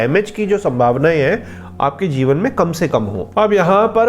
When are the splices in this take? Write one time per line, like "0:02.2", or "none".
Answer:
0:03.2